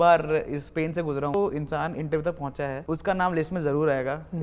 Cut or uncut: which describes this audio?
cut